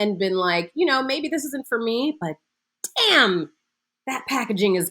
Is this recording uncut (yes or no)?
yes